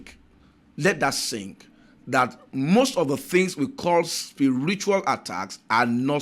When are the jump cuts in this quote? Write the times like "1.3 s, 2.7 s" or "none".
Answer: none